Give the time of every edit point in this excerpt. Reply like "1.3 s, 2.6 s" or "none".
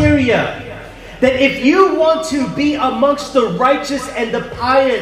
none